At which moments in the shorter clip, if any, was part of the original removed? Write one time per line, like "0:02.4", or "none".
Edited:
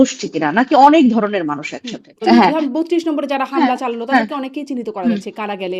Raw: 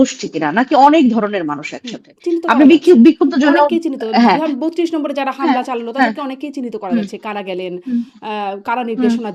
0:02.1